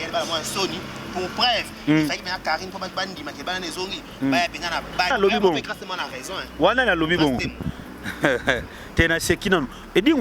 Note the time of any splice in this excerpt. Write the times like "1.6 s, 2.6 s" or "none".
5.1 s